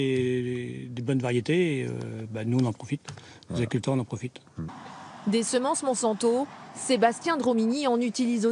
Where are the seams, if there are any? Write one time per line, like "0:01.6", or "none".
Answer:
0:04.5